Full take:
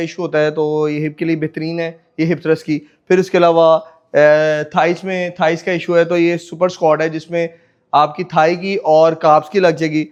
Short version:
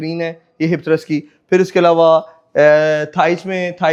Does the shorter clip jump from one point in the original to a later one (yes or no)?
no